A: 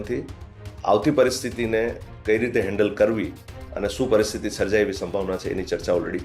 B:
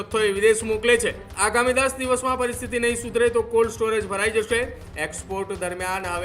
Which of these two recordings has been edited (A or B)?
B